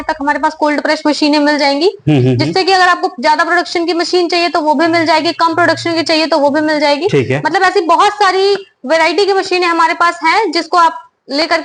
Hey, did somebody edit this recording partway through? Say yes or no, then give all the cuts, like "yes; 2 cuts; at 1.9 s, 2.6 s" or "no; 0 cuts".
no; 0 cuts